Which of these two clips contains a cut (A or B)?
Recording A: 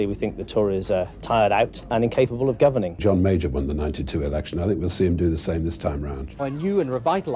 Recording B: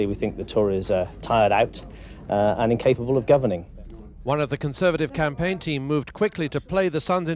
A